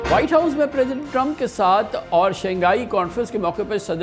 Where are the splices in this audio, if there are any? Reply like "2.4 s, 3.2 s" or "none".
none